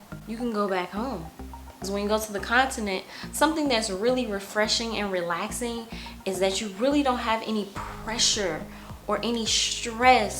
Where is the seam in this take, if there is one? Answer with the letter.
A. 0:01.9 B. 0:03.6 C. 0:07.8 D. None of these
A